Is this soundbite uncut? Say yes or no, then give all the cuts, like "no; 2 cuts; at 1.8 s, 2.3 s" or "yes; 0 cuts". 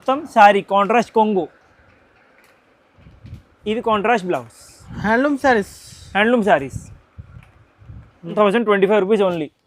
no; 1 cut; at 8.3 s